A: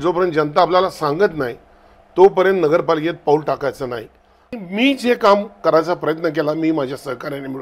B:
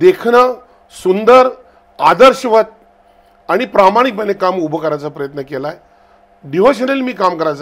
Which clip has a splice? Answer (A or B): A